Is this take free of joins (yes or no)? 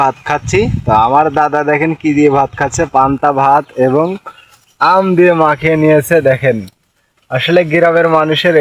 yes